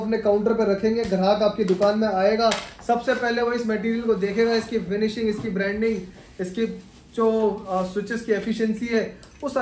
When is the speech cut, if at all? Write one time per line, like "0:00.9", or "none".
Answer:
none